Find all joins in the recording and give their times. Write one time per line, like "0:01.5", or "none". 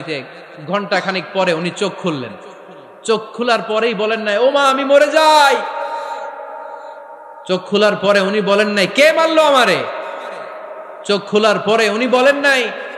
none